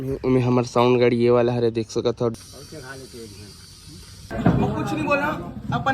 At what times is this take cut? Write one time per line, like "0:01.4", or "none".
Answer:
0:02.4
0:04.3